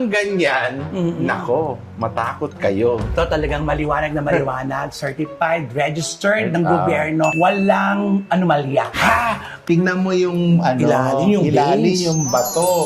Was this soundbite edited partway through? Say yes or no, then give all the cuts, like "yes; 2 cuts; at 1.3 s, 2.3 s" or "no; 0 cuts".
yes; 2 cuts; at 3.1 s, 9.6 s